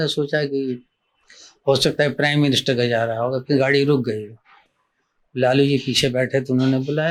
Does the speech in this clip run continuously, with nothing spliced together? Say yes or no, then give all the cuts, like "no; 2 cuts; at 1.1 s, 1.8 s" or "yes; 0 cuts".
yes; 0 cuts